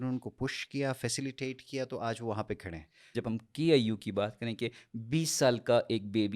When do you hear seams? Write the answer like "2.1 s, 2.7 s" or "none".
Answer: 3.1 s

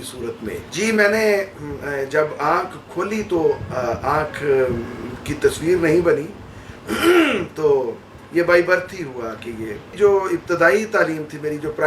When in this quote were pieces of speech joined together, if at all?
none

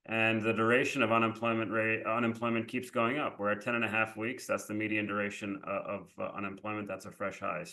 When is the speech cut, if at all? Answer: none

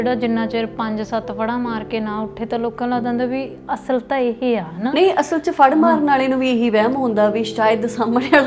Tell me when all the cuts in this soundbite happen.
none

